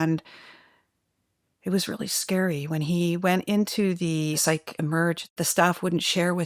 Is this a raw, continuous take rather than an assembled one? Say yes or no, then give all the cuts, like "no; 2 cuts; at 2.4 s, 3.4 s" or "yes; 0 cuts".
no; 2 cuts; at 4.4 s, 5.3 s